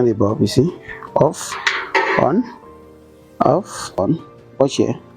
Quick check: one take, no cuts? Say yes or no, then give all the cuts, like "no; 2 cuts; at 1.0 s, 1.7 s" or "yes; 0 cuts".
no; 1 cut; at 4.0 s